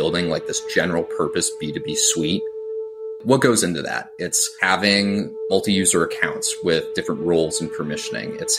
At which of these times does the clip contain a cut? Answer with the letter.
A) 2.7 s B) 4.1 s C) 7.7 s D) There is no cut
A